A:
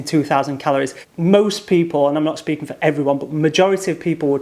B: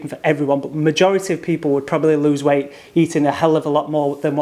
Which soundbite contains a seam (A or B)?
A